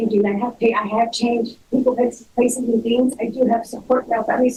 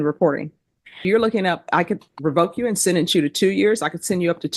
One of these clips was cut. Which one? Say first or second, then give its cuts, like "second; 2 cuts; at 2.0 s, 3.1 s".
second; 1 cut; at 1.0 s